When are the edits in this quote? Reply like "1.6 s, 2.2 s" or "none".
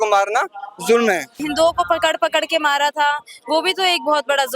1.4 s